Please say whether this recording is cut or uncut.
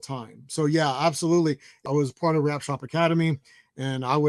cut